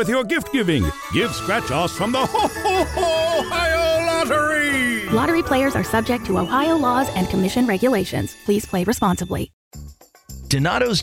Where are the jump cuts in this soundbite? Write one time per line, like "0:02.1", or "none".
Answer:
0:09.5